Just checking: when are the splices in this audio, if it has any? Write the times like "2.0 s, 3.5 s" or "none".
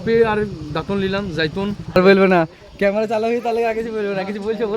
2.0 s